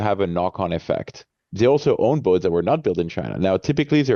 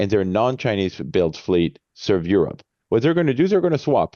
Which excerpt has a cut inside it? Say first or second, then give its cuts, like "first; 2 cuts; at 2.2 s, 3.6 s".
first; 1 cut; at 1.4 s